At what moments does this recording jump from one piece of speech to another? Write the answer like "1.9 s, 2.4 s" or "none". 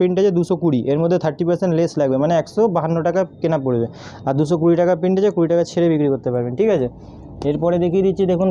none